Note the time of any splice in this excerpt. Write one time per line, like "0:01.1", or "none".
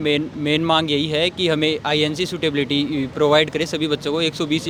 none

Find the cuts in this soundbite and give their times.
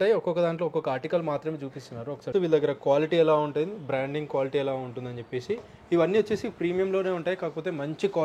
0:02.3

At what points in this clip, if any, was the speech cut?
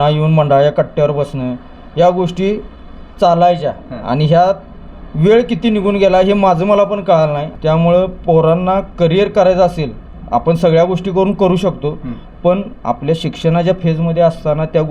0:07.5

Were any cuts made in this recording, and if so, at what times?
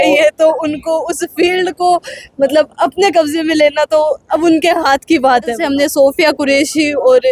0:05.6

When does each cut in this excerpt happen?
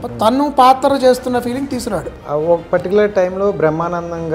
0:02.2

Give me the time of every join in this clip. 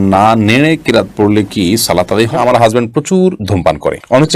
0:02.3

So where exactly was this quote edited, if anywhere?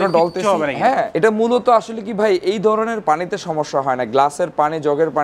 none

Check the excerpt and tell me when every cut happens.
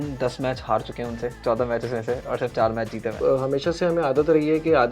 0:01.4
0:03.2

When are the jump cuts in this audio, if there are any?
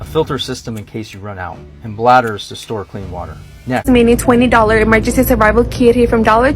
0:03.8

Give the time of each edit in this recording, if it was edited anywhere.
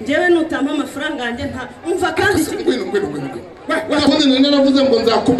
0:04.1

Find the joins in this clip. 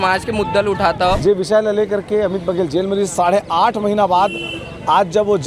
0:01.2

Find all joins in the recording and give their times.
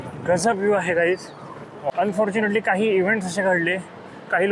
0:01.9

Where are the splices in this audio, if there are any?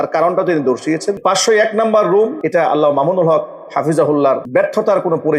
0:01.2
0:02.4
0:04.4

